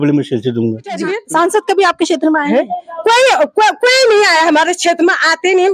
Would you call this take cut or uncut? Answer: cut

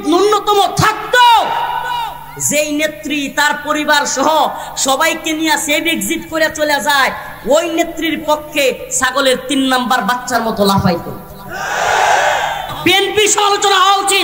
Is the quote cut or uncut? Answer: cut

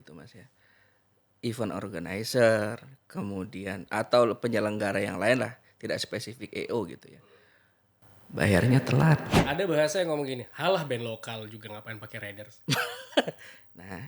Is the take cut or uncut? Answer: cut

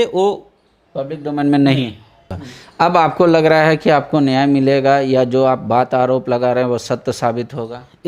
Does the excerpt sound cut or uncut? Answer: cut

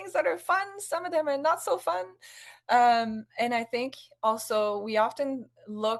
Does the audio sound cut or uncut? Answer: uncut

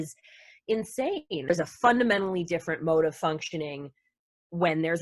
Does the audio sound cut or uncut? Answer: cut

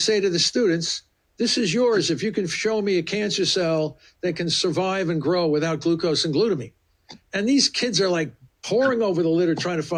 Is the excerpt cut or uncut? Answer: uncut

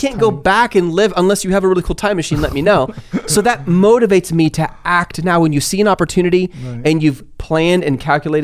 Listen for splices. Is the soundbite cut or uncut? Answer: uncut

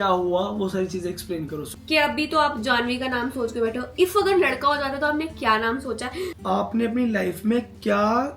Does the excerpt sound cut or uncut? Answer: cut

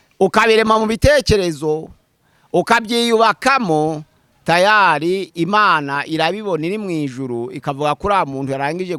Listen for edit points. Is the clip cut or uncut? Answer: uncut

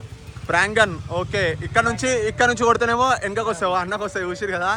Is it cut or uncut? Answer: uncut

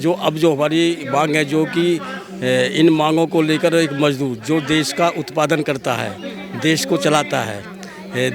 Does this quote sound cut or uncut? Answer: uncut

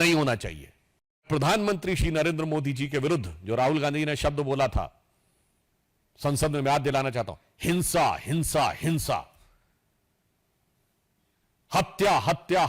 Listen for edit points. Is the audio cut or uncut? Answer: cut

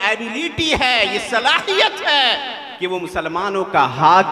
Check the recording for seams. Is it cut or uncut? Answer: cut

